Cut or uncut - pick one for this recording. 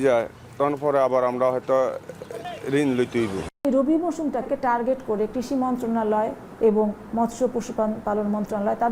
cut